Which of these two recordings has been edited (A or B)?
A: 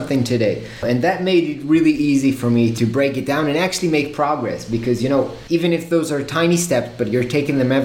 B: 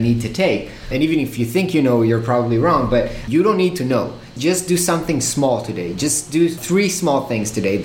B